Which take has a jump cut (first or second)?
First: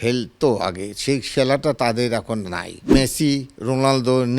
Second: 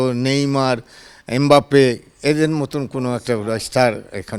first